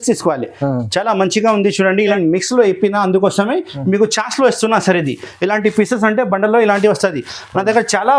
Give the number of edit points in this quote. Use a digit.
1